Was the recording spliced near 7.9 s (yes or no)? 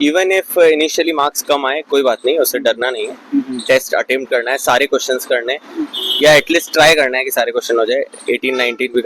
no